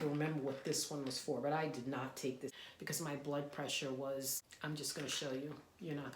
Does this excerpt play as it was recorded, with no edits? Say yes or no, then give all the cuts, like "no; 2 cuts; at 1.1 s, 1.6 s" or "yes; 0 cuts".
no; 2 cuts; at 2.5 s, 4.4 s